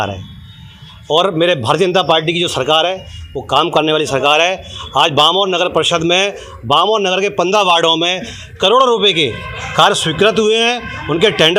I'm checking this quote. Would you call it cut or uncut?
uncut